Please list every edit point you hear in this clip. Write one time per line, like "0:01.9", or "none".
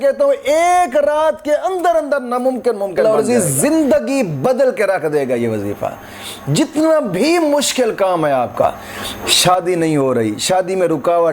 0:03.0